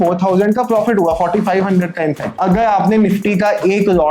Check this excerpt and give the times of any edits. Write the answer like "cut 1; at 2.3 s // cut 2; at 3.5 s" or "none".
cut 1; at 2.3 s